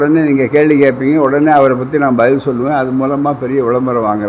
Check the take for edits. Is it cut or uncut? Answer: uncut